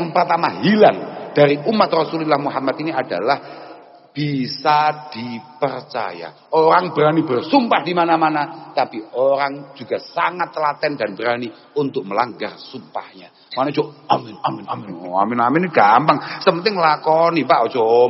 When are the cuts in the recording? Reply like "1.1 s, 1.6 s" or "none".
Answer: none